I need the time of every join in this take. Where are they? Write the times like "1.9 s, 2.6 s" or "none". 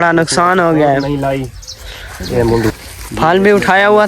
2.7 s

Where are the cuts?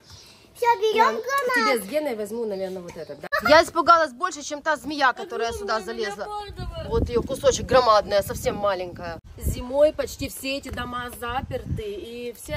3.3 s, 9.4 s

